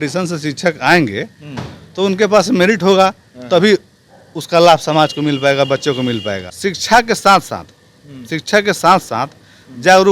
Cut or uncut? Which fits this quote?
cut